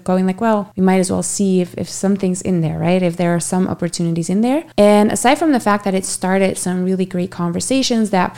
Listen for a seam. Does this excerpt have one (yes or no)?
no